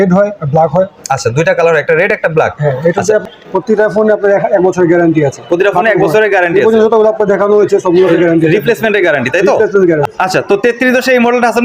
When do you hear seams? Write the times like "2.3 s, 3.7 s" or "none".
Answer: 3.2 s, 10.0 s